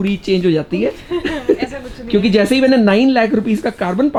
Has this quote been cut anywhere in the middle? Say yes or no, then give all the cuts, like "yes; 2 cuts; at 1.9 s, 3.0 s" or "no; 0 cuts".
no; 0 cuts